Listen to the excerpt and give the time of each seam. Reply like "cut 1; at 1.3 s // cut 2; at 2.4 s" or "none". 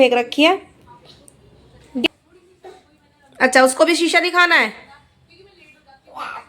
cut 1; at 2.0 s